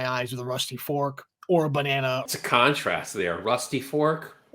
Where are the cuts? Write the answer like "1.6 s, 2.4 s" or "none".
2.2 s

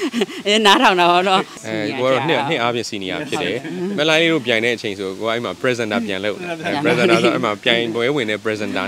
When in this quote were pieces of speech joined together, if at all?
1.6 s

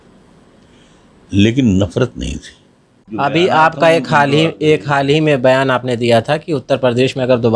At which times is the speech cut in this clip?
3.0 s

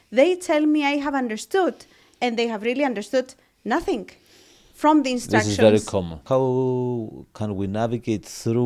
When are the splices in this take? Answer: 6.2 s

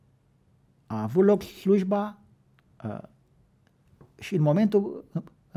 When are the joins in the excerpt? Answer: none

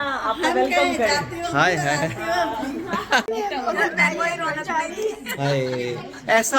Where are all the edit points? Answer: 3.2 s

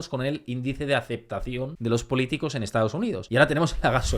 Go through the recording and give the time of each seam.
1.7 s, 3.2 s

